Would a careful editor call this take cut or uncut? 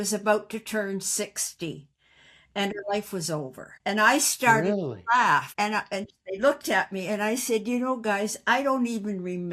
cut